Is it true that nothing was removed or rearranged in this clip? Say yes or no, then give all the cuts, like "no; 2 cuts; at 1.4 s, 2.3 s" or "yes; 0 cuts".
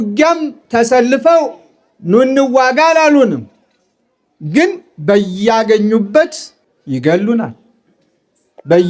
yes; 0 cuts